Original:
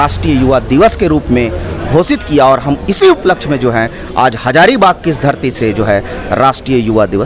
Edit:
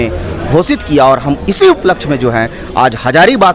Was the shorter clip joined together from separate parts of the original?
no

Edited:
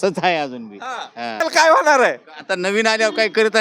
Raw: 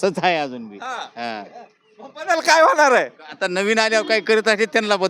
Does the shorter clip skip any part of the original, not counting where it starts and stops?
yes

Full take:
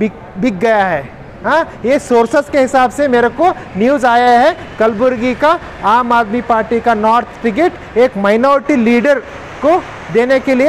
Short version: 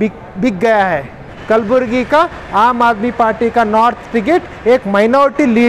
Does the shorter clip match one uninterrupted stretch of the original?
no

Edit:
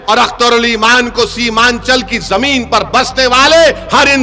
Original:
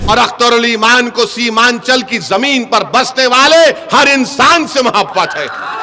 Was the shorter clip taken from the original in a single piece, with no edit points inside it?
yes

